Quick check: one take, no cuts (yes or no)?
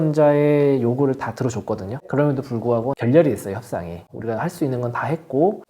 no